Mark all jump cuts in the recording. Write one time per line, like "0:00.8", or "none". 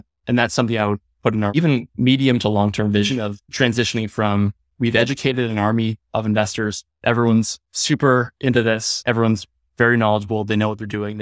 0:01.5
0:03.4
0:04.6